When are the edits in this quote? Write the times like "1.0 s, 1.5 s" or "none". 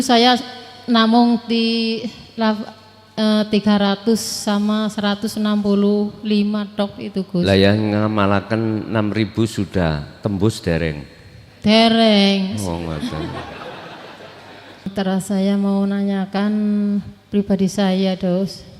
14.9 s